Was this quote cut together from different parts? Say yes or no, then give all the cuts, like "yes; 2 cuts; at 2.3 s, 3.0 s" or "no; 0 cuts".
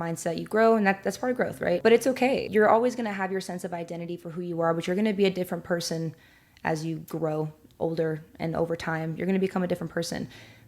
yes; 2 cuts; at 1.8 s, 2.4 s